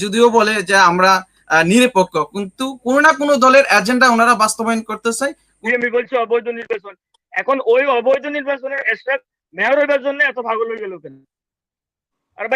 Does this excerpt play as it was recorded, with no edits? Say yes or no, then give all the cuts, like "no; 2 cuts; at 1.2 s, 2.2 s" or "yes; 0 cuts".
no; 1 cut; at 5.5 s